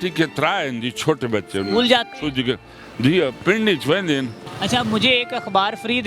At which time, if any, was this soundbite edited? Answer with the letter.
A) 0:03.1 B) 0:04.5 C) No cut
B